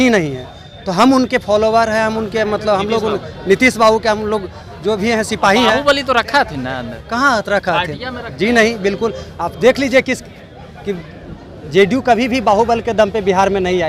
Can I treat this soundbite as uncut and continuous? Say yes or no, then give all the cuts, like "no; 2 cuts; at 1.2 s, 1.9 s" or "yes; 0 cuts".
yes; 0 cuts